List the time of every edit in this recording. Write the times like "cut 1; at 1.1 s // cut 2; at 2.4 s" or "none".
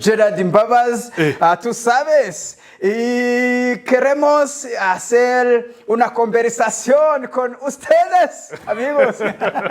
none